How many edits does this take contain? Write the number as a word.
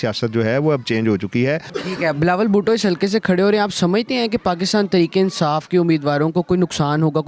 zero